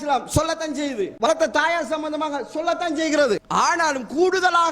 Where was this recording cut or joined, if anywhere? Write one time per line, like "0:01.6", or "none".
0:01.3
0:03.4